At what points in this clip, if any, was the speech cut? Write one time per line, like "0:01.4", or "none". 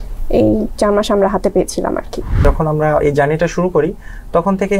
0:02.4